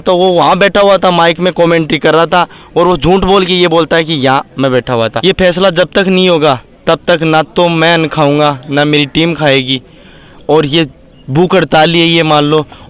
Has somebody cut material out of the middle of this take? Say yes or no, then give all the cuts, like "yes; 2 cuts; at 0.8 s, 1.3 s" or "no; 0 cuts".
yes; 1 cut; at 5.2 s